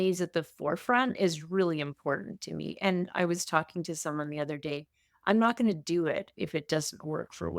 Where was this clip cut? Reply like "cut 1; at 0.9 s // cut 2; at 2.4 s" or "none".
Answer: none